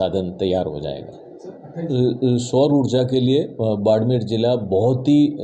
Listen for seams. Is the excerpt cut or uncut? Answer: cut